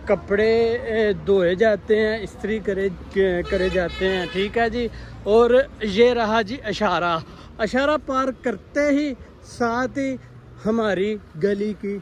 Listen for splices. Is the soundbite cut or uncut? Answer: uncut